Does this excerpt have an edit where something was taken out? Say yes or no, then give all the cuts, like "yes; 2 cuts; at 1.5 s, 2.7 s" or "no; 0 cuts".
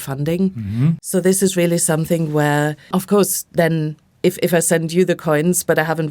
yes; 2 cuts; at 1.0 s, 2.9 s